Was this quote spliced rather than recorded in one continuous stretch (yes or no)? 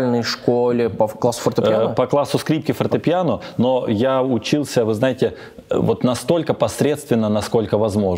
no